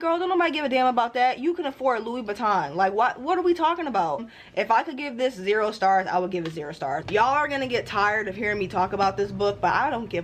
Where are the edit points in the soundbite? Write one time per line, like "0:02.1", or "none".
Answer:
0:04.3
0:07.0